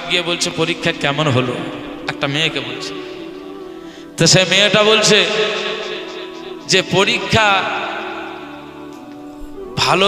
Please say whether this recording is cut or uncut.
cut